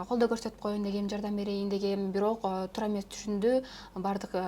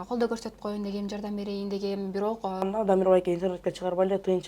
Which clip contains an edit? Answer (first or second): second